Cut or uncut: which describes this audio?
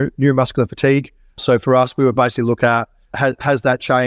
cut